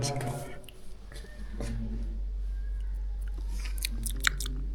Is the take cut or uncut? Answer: uncut